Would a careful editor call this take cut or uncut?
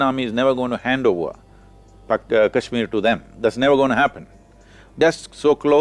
cut